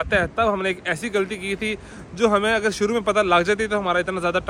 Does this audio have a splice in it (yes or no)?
no